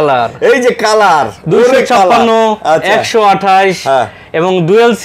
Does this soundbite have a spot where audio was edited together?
no; 0 cuts

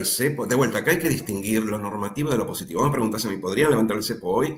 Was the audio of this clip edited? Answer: no; 0 cuts

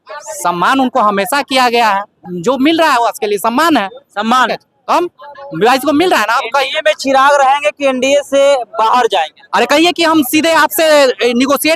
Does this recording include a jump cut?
yes; 2 cuts; at 2.2 s, 9.4 s

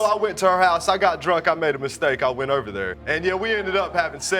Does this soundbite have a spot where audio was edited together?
yes; 1 cut; at 3.0 s

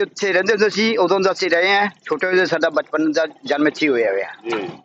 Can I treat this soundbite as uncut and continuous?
yes; 0 cuts

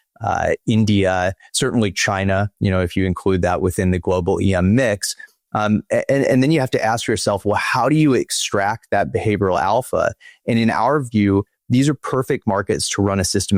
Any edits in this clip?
no; 0 cuts

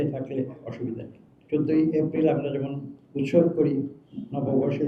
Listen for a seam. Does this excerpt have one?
yes; 1 cut; at 1.3 s

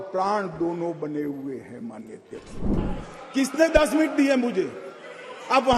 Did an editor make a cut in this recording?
yes; 1 cut; at 2.7 s

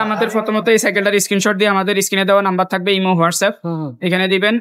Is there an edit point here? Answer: no; 0 cuts

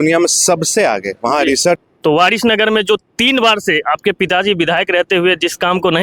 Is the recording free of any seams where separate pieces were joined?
no; 1 cut; at 1.8 s

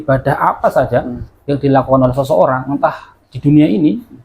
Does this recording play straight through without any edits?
yes; 0 cuts

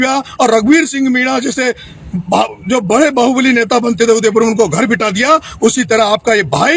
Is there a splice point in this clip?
no; 0 cuts

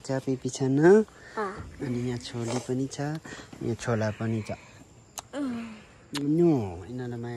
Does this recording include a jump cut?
no; 0 cuts

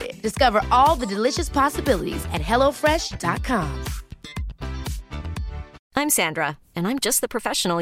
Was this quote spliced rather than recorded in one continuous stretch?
yes; 1 cut; at 5.8 s

